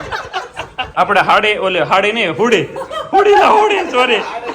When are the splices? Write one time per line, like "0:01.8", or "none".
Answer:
0:01.0